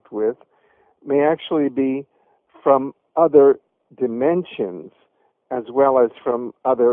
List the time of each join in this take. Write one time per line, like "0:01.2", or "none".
0:02.6